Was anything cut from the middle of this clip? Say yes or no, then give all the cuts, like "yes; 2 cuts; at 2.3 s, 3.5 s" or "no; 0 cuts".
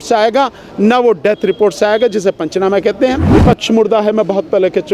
yes; 1 cut; at 3.2 s